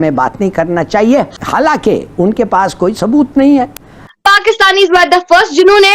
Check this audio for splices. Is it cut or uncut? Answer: cut